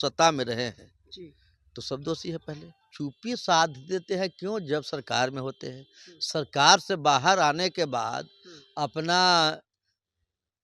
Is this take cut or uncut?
cut